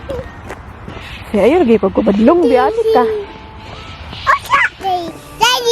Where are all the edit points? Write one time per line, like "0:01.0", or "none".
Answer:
0:04.7